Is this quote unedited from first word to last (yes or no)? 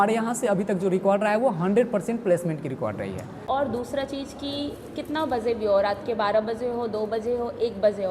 no